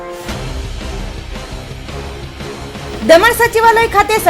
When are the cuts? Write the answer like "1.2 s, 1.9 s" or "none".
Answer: 2.6 s